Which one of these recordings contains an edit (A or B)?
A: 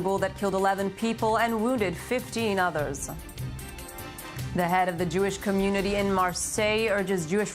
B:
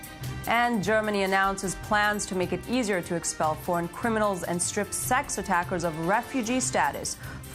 A